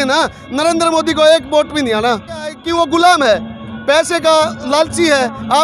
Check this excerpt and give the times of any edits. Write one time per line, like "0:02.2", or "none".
0:02.6